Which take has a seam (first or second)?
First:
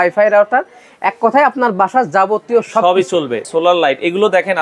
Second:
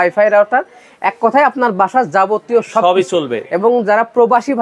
first